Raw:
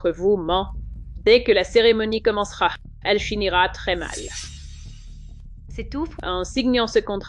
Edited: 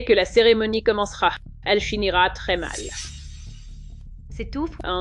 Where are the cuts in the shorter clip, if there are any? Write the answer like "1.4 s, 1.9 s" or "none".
none